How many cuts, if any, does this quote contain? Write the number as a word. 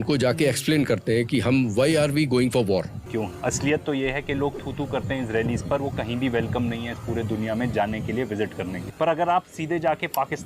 two